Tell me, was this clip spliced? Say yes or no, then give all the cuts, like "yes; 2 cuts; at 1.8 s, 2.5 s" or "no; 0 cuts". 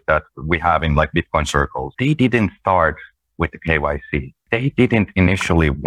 yes; 2 cuts; at 1.8 s, 4.4 s